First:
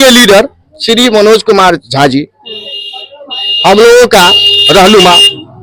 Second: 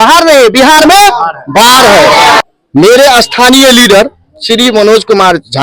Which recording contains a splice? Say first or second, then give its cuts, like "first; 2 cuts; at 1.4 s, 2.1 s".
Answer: second; 1 cut; at 2.4 s